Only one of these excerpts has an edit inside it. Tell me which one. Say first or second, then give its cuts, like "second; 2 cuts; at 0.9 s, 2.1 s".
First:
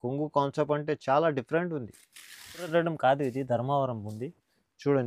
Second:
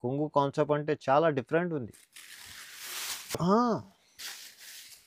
first; 1 cut; at 2.7 s